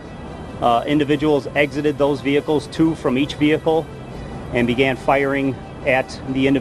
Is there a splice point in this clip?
no; 0 cuts

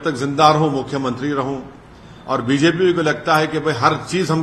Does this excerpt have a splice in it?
no; 0 cuts

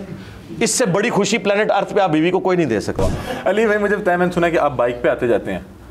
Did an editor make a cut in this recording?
yes; 1 cut; at 3.0 s

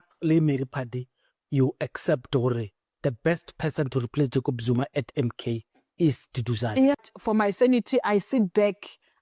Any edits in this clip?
yes; 1 cut; at 7.0 s

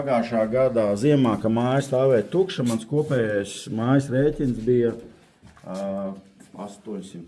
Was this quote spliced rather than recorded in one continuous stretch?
no; 0 cuts

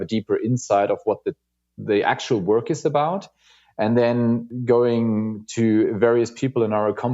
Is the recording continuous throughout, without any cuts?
no; 1 cut; at 4.5 s

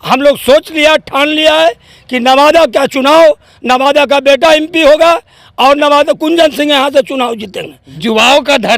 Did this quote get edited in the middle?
yes; 1 cut; at 7.8 s

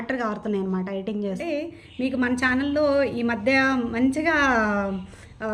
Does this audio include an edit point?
yes; 1 cut; at 1.4 s

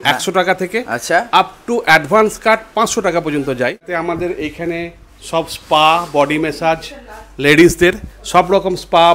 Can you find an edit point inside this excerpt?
yes; 1 cut; at 3.9 s

